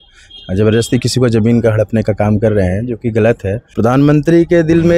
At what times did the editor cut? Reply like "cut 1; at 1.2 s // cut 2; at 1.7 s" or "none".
cut 1; at 3.6 s